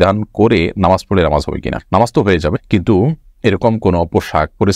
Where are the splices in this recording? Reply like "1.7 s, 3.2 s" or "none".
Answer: none